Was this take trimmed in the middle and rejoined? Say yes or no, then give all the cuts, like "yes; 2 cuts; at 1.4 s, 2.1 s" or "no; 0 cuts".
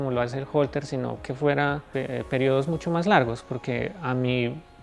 yes; 1 cut; at 1.9 s